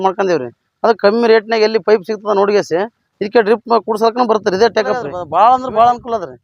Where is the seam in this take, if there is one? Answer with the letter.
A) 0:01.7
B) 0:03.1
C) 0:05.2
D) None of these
C